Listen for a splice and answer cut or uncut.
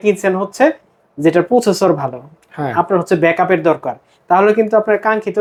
uncut